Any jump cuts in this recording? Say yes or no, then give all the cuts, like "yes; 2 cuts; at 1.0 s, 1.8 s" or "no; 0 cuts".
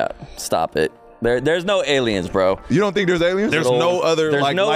yes; 1 cut; at 3.5 s